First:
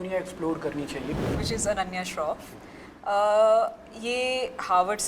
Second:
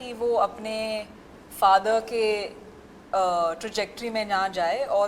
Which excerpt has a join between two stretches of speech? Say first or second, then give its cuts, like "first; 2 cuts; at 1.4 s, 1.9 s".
first; 1 cut; at 1.3 s